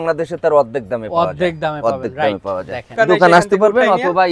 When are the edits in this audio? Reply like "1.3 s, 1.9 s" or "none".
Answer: 2.9 s